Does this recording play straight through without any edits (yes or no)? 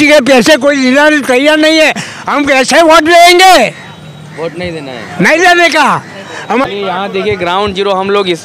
no